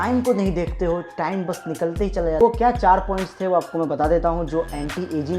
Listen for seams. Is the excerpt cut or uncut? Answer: cut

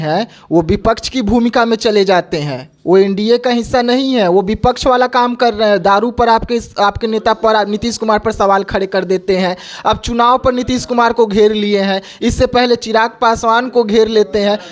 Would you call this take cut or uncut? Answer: uncut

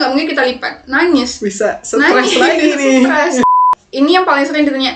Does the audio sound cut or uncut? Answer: cut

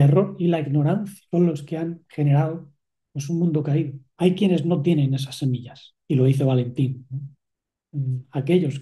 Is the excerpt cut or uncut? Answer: cut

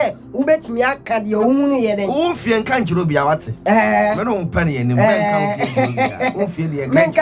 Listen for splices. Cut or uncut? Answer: uncut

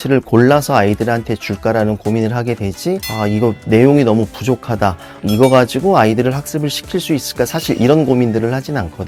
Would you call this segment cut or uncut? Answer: uncut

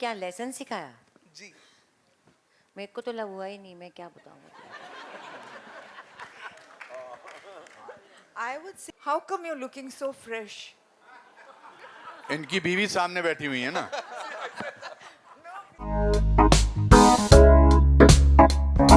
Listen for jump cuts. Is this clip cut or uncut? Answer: cut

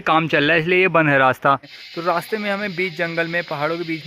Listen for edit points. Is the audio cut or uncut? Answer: cut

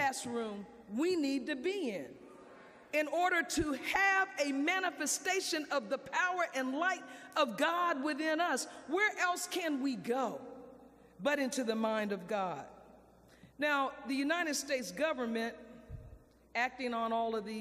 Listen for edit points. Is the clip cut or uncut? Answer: uncut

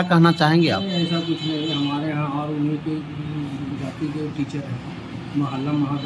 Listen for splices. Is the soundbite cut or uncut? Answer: uncut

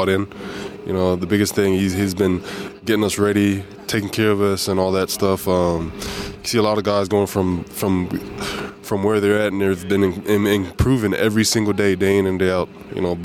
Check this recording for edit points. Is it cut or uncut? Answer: uncut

